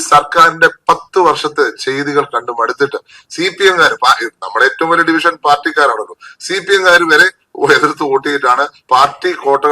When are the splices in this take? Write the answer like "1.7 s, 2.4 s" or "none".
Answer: none